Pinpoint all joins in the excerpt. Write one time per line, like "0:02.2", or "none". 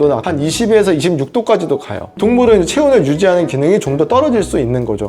none

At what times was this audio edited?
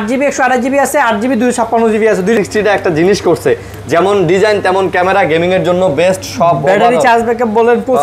0:02.4

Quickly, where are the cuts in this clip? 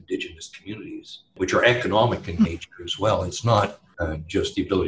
0:01.2
0:03.9

